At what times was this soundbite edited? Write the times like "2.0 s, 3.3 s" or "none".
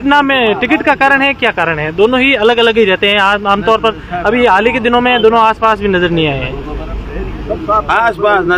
none